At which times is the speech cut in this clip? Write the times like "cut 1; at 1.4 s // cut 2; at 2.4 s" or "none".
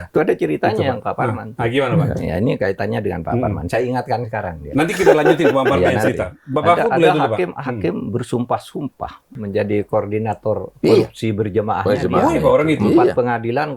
cut 1; at 9.4 s